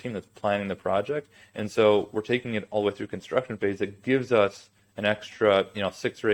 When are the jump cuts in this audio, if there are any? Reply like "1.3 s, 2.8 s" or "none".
none